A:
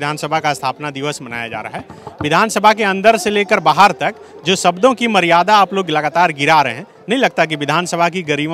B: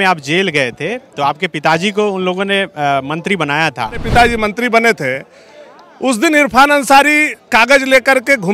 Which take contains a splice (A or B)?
B